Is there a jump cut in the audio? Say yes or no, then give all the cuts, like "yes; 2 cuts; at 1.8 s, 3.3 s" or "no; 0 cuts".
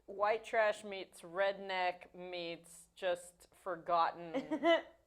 no; 0 cuts